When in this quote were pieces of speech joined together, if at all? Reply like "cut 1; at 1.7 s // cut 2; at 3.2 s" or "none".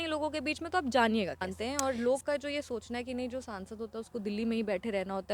cut 1; at 1.5 s